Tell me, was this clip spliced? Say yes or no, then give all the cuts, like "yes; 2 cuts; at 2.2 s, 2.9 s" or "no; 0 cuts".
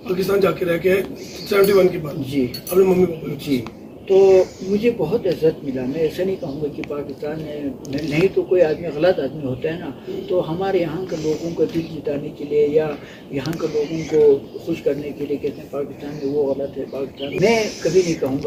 no; 0 cuts